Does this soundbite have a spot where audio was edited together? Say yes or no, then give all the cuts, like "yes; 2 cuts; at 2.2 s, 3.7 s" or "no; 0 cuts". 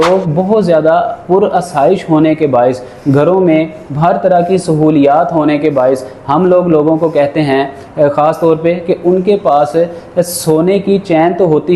no; 0 cuts